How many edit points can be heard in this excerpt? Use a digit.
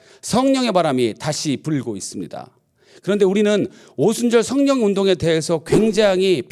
0